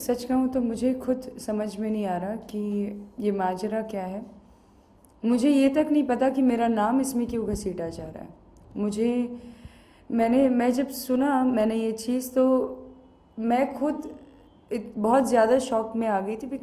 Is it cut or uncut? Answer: uncut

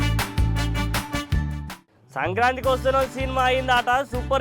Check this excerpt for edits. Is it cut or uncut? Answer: cut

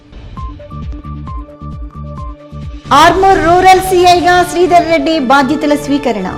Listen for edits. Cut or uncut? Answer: uncut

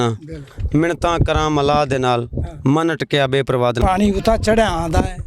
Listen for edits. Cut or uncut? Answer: cut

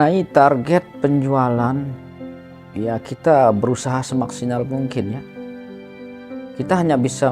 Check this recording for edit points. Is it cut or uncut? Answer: cut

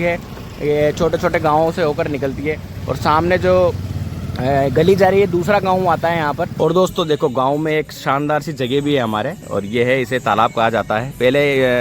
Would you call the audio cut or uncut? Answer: cut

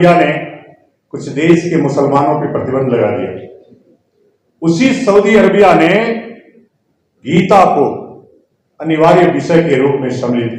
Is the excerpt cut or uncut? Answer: uncut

